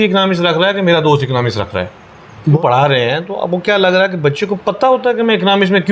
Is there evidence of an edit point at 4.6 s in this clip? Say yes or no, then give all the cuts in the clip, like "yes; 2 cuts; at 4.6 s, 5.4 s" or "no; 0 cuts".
no; 1 cut; at 2.6 s